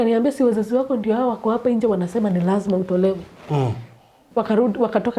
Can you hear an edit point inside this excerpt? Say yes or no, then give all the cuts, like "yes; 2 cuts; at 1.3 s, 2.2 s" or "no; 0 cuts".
yes; 1 cut; at 4.2 s